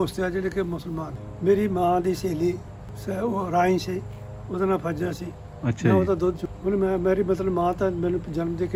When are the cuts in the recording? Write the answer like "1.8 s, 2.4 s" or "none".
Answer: none